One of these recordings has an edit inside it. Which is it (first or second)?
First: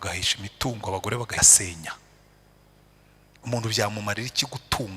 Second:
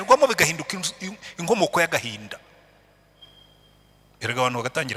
first